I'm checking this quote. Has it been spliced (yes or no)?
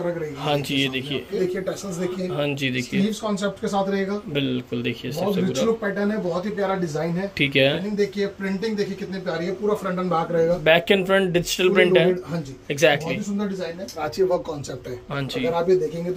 yes